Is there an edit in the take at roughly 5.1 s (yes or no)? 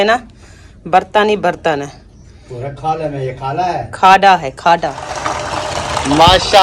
yes